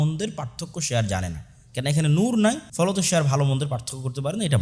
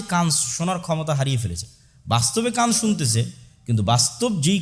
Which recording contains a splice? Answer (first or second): first